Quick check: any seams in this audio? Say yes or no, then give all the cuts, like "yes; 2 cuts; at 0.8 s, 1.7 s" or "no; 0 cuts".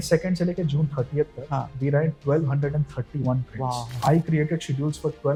no; 0 cuts